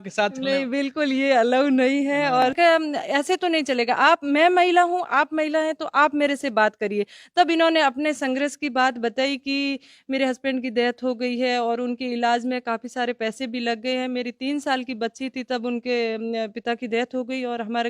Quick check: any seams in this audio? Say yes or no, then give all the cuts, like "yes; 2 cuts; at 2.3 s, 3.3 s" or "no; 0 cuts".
yes; 1 cut; at 2.5 s